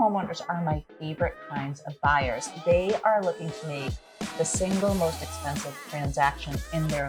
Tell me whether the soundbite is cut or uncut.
uncut